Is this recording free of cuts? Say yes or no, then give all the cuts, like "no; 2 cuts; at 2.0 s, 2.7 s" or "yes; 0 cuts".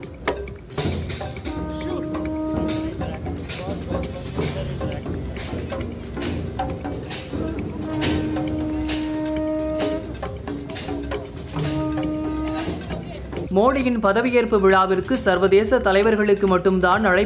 no; 1 cut; at 13.5 s